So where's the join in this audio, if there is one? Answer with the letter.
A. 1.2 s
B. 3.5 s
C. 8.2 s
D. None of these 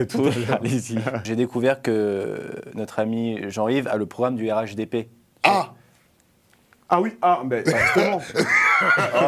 A